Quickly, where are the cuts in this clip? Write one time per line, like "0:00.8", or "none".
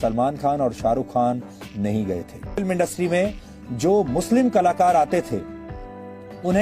0:02.6